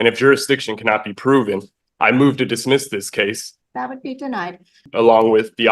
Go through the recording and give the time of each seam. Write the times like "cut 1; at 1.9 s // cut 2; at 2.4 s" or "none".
cut 1; at 3.5 s // cut 2; at 4.8 s